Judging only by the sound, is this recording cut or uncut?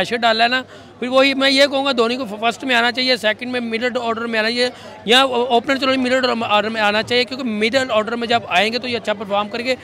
uncut